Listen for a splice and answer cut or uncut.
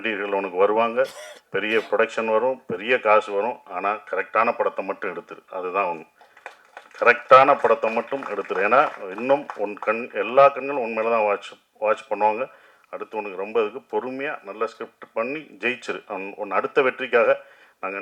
uncut